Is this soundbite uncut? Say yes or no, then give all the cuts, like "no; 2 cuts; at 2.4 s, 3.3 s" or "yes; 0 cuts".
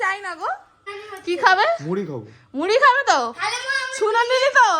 no; 1 cut; at 0.9 s